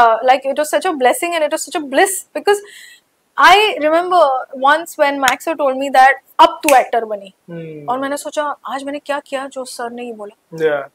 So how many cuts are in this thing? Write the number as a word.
zero